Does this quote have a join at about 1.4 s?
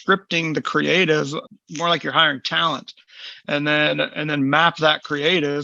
yes; 1 cut; at 1.4 s

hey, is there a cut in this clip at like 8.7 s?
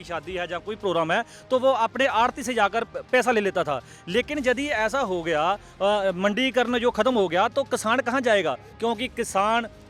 yes; 1 cut; at 8.7 s

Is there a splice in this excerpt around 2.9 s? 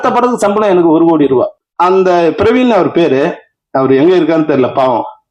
no; 1 cut; at 1.6 s

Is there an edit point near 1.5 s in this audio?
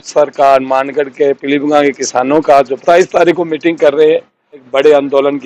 no; 2 cuts; at 2.8 s, 4.7 s

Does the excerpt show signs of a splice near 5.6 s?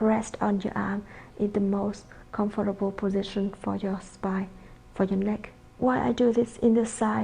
yes; 1 cut; at 5.6 s

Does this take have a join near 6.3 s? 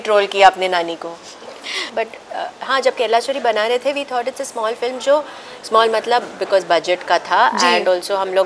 no; 1 cut; at 1.9 s

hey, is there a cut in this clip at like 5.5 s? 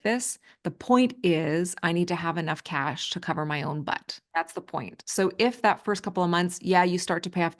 no; 1 cut; at 4.2 s

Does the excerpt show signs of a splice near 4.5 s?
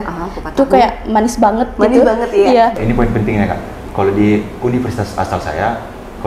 no; 1 cut; at 2.8 s

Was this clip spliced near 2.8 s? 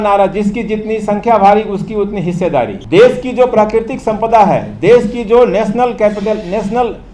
yes; 1 cut; at 2.8 s

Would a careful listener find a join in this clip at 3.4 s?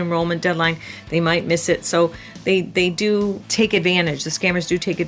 yes; 1 cut; at 3.4 s

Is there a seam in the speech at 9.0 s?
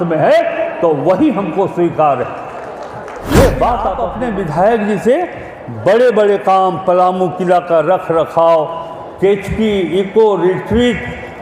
no; 1 cut; at 4.1 s

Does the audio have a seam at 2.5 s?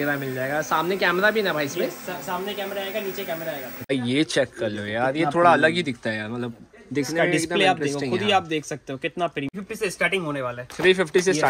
no; 2 cuts; at 3.9 s, 9.5 s

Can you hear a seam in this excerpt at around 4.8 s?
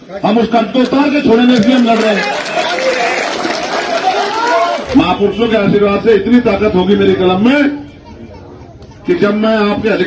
yes; 1 cut; at 4.8 s

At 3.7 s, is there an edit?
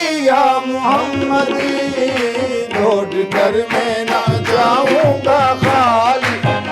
no; 0 cuts

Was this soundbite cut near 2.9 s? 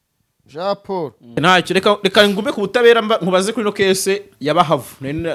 no; 1 cut; at 1.4 s

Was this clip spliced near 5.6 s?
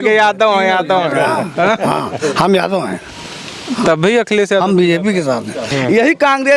yes; 1 cut; at 5.6 s

